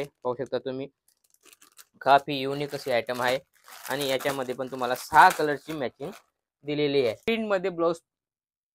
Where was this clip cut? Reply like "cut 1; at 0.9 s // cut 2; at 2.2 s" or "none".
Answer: cut 1; at 7.3 s